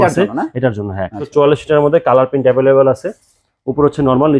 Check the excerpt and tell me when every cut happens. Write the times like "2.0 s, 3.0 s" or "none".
1.2 s